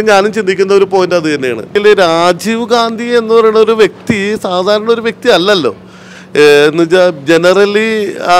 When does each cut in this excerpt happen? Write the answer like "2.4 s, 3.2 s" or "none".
1.8 s